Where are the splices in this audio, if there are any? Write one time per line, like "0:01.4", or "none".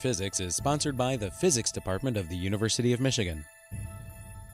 0:03.6